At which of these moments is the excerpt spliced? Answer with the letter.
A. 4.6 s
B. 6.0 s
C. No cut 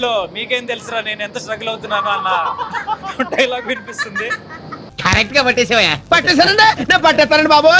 C